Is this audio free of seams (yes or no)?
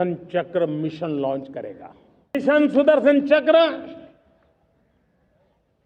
no